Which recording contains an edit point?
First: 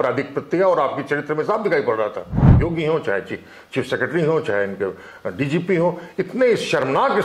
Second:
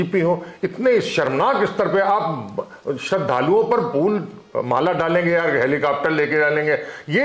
first; 1 cut; at 2.6 s

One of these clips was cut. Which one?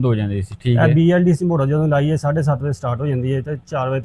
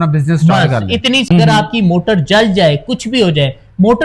second; 1 cut; at 1.3 s

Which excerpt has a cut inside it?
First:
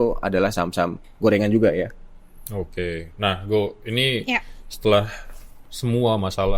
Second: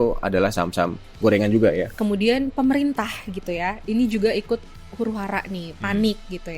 second; 1 cut; at 1.9 s

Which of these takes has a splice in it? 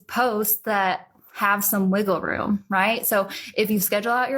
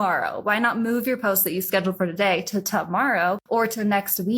second; 1 cut; at 3.4 s

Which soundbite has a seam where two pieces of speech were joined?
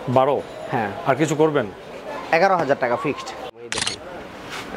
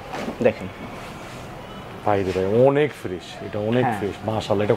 first; 1 cut; at 3.6 s

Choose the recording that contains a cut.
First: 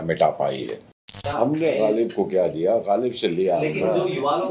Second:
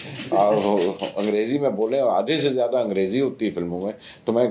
first; 1 cut; at 1.2 s

